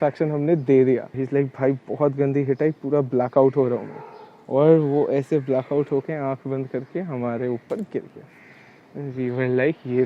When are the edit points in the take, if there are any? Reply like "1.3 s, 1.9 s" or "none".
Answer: 1.1 s